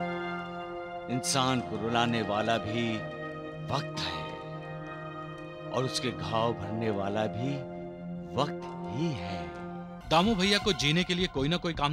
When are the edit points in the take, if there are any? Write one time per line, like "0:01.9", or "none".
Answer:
0:10.0